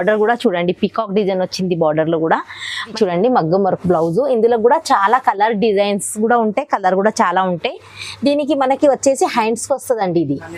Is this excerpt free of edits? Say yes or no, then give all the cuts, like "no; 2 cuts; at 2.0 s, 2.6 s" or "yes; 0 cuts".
no; 1 cut; at 2.9 s